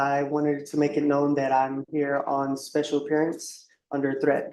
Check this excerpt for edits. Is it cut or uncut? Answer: uncut